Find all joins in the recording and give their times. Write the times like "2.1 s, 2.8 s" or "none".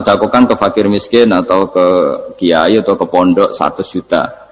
none